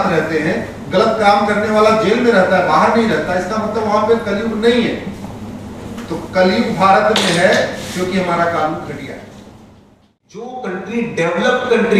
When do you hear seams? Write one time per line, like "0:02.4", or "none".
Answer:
0:10.5

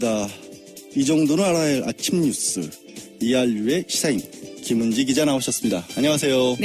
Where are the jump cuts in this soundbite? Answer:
0:04.9

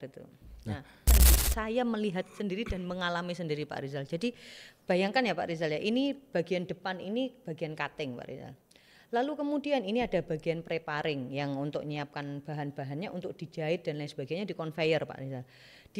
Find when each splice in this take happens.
0:01.1

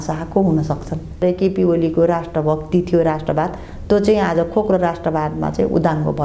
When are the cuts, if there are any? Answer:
0:01.2

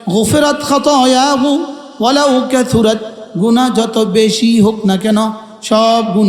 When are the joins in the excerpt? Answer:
none

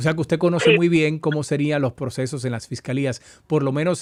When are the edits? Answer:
none

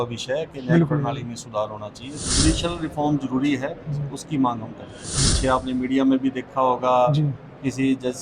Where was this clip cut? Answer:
0:02.2
0:05.3

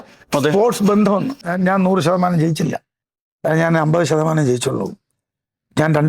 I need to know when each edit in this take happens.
0:01.4

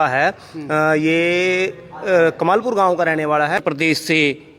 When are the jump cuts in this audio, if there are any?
0:03.6

